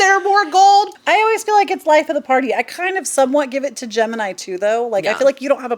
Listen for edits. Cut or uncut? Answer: cut